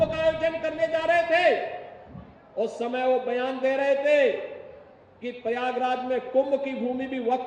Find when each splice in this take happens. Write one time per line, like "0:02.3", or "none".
none